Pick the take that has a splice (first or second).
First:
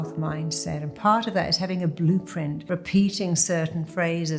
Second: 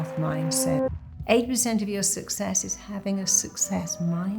second